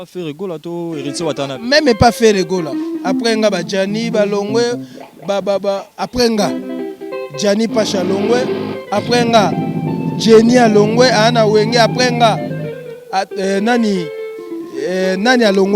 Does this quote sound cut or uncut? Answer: uncut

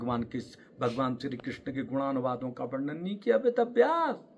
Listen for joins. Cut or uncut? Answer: uncut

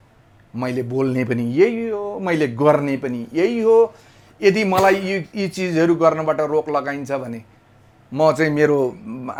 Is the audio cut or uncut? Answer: uncut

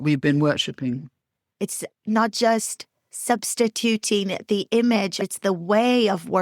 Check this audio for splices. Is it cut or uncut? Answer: cut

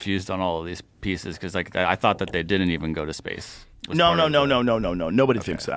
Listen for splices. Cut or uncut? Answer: uncut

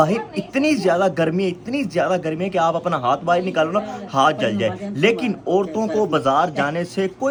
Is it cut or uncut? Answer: uncut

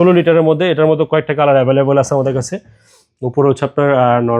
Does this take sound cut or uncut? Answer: uncut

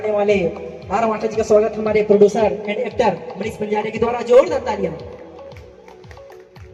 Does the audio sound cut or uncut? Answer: uncut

